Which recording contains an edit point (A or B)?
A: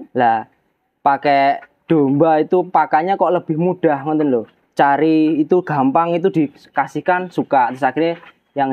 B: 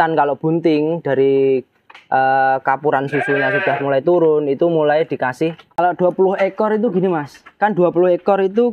B